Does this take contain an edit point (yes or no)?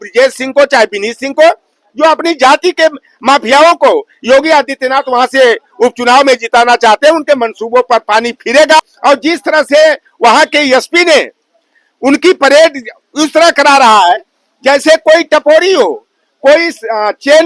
yes